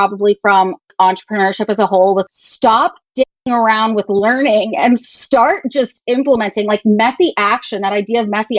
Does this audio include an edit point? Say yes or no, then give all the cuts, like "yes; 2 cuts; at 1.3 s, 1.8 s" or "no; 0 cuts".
yes; 2 cuts; at 0.9 s, 2.3 s